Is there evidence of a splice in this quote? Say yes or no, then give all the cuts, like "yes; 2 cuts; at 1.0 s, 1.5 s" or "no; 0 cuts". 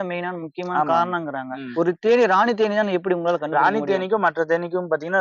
yes; 1 cut; at 1.7 s